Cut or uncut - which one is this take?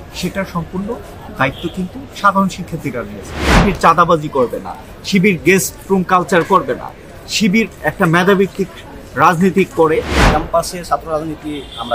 cut